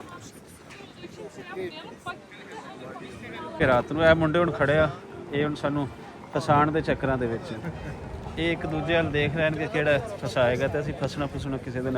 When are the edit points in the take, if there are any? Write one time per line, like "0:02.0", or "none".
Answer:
0:03.6